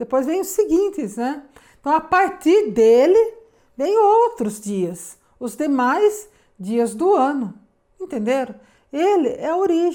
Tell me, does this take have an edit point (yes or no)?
no